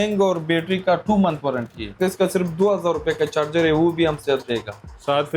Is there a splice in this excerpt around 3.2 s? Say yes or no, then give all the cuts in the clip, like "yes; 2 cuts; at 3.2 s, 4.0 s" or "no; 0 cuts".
no; 1 cut; at 1.9 s